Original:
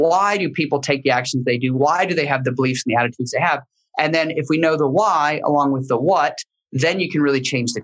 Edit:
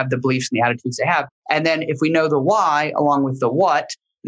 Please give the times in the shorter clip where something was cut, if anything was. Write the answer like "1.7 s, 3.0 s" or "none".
1.3 s